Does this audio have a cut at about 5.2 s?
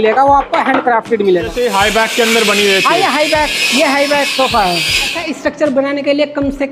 yes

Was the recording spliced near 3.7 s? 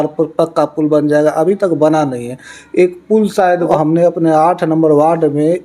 yes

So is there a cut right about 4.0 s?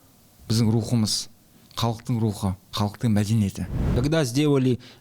yes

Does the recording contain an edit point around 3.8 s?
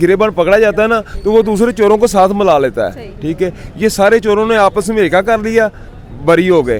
no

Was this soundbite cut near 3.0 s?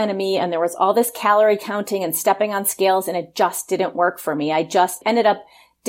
no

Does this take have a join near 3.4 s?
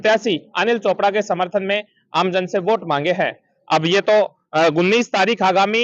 no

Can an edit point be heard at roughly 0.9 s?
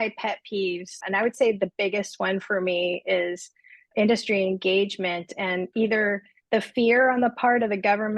yes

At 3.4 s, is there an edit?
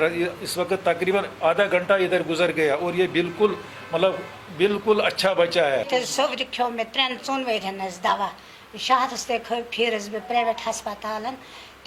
no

